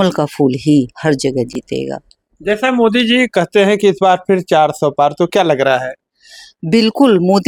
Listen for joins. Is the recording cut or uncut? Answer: uncut